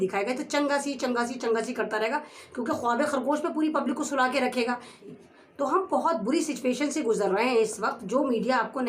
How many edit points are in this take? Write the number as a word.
one